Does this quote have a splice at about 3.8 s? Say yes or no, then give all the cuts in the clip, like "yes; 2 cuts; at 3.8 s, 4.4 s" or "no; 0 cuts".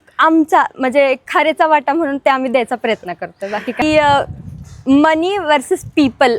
yes; 1 cut; at 3.8 s